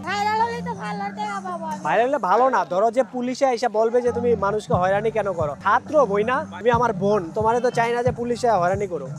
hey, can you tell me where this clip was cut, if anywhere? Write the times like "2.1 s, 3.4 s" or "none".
none